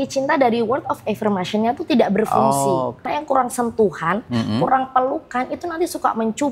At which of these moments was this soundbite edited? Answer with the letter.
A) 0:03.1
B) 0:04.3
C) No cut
A